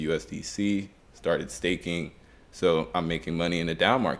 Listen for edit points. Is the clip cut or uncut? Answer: uncut